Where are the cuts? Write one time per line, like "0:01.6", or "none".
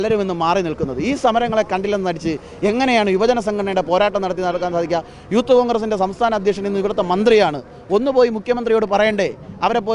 none